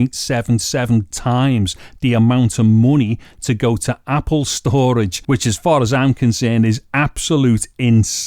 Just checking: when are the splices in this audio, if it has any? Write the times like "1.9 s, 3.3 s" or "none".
5.2 s